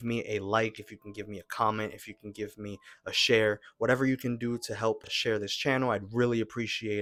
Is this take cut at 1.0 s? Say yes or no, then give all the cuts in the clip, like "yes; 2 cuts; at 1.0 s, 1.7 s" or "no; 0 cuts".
no; 0 cuts